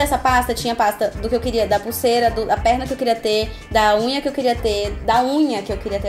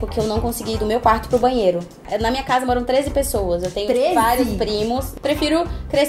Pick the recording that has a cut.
second; 2 cuts; at 2.0 s, 5.1 s

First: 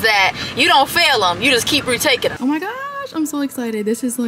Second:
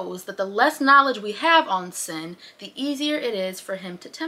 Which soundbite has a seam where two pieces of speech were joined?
first; 1 cut; at 2.4 s

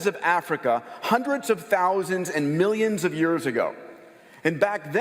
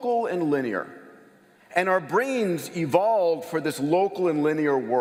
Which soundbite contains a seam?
first; 1 cut; at 1.8 s

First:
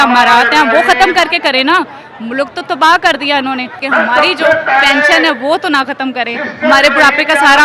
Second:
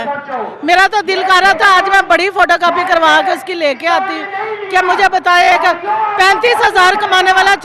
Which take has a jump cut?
first; 1 cut; at 3.8 s

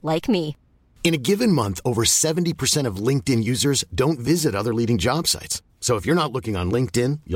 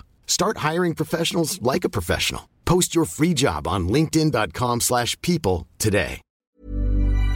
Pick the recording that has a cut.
second; 1 cut; at 6.3 s

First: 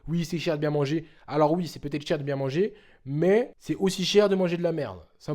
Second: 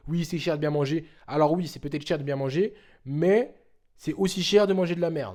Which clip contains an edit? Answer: first; 1 cut; at 3.6 s

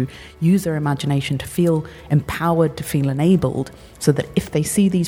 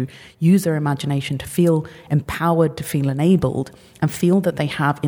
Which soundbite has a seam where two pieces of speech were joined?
first; 1 cut; at 3.8 s

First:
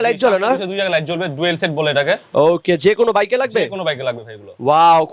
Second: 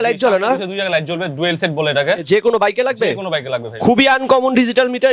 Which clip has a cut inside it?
second; 2 cuts; at 2.2 s, 3.8 s

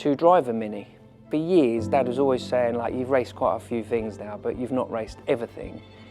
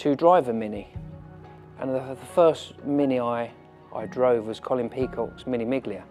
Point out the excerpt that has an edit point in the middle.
first; 1 cut; at 1.2 s

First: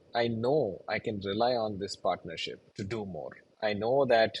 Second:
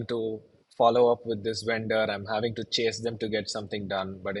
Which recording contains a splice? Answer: first; 2 cuts; at 2.7 s, 3.4 s

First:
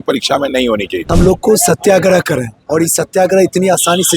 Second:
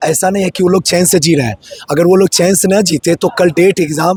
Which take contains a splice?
first; 1 cut; at 1.1 s

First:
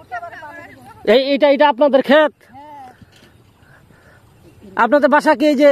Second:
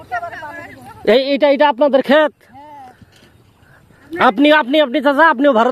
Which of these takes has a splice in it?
second; 1 cut; at 4.1 s

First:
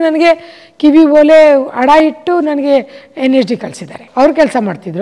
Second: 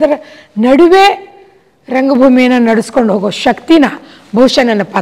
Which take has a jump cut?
first; 1 cut; at 4.0 s

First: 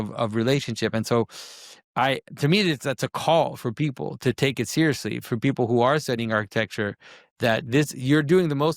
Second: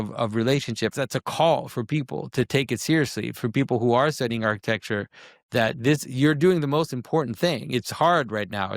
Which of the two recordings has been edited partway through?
second; 1 cut; at 0.9 s

